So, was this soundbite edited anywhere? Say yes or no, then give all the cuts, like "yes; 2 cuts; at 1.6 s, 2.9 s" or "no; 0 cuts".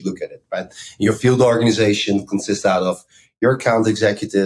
no; 0 cuts